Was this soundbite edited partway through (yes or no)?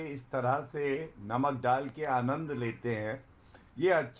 no